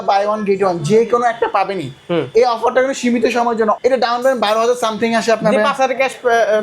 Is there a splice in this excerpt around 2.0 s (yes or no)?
no